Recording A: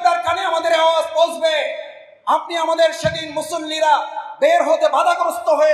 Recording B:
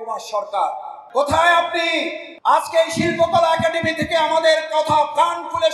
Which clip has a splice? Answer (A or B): B